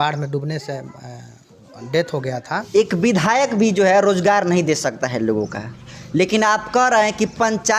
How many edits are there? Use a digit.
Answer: 1